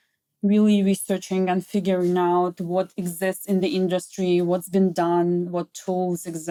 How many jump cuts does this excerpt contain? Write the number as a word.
zero